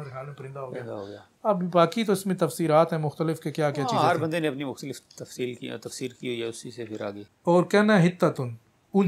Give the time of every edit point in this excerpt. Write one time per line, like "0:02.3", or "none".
0:07.3